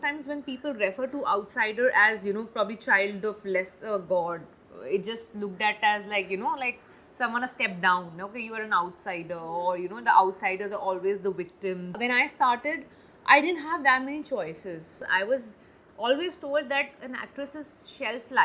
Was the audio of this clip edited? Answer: yes; 2 cuts; at 12.0 s, 15.1 s

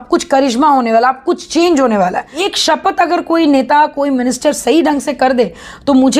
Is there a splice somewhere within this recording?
yes; 1 cut; at 2.5 s

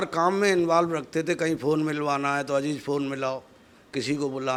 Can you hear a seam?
no; 0 cuts

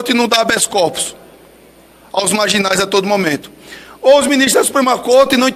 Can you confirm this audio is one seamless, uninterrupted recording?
yes; 0 cuts

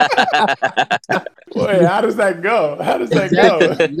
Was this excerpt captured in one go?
no; 1 cut; at 1.5 s

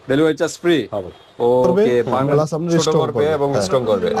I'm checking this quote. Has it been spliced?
yes; 1 cut; at 2.1 s

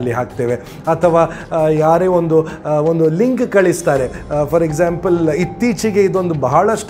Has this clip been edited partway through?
no; 0 cuts

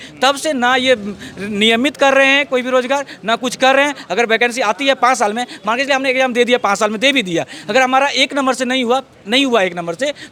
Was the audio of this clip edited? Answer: no; 0 cuts

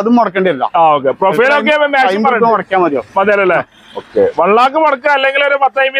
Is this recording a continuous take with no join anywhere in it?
yes; 0 cuts

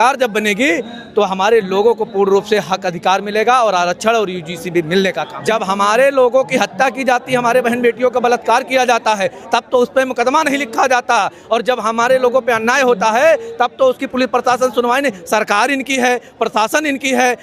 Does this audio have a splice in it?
yes; 1 cut; at 5.3 s

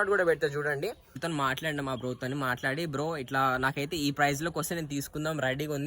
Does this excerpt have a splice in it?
yes; 1 cut; at 1.2 s

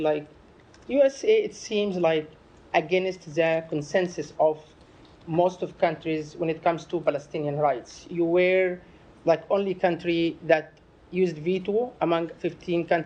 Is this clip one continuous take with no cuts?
yes; 0 cuts

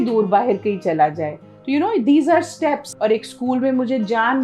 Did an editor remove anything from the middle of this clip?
yes; 1 cut; at 2.9 s

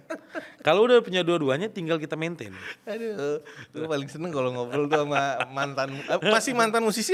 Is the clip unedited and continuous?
yes; 0 cuts

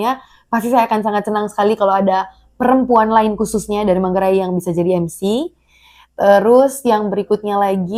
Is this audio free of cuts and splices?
yes; 0 cuts

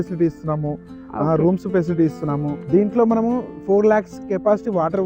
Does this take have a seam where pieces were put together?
yes; 1 cut; at 2.6 s

